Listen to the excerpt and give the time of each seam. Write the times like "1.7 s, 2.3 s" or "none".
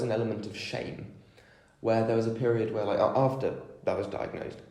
none